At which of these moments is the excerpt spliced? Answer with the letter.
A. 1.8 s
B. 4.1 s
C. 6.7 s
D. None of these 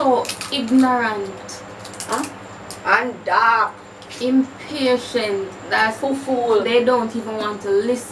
D